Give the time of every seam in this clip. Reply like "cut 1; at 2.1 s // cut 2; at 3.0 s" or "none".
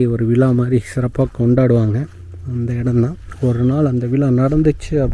none